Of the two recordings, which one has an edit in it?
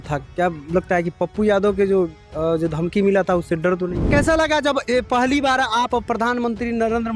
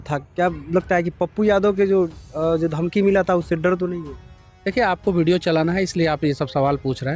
first; 1 cut; at 4.1 s

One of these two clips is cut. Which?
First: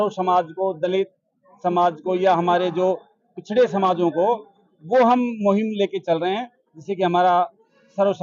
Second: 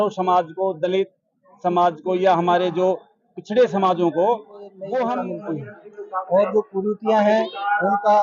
second; 1 cut; at 5.3 s

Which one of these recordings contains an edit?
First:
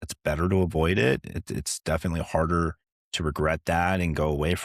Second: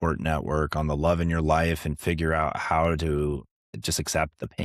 second; 1 cut; at 3.7 s

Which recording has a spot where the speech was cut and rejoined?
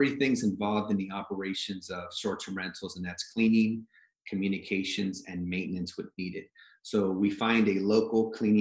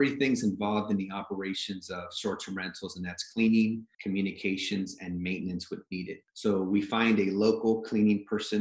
second; 2 cuts; at 3.9 s, 6.2 s

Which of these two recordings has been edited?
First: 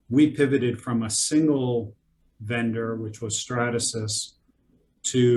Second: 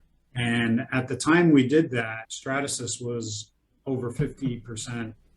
second; 1 cut; at 2.3 s

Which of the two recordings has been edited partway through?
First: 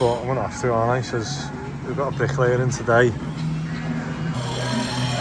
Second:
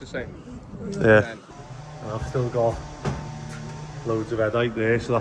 second; 1 cut; at 1.4 s

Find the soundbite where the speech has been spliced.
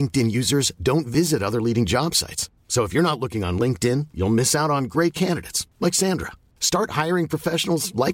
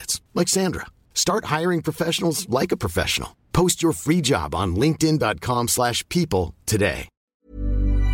second; 1 cut; at 7.1 s

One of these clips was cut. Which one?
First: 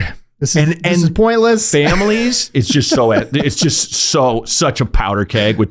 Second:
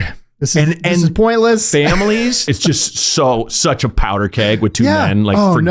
second; 1 cut; at 2.5 s

